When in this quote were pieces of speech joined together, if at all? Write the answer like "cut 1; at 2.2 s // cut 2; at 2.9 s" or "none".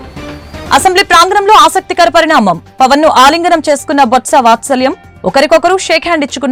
none